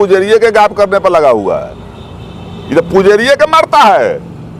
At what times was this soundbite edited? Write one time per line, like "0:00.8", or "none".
none